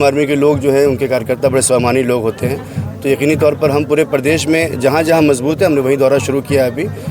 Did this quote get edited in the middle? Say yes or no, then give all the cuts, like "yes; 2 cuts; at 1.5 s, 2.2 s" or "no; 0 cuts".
no; 0 cuts